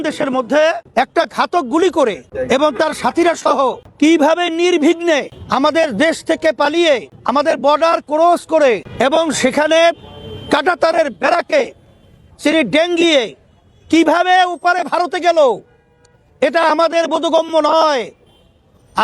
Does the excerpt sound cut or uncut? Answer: cut